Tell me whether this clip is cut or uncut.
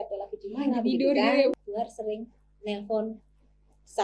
cut